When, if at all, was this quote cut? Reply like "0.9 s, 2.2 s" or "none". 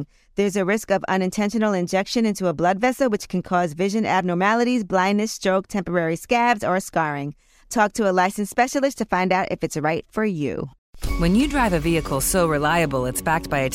10.7 s